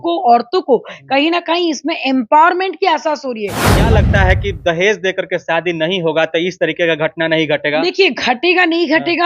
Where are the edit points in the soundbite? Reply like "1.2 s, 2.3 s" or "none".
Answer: 3.9 s